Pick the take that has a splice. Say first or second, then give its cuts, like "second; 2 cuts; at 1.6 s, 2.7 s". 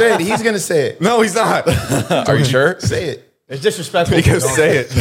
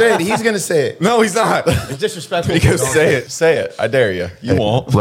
second; 2 cuts; at 1.8 s, 3.3 s